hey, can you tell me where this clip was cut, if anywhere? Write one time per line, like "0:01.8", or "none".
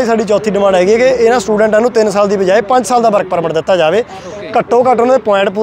none